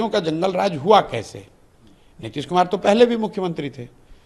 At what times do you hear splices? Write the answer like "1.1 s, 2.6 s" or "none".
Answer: none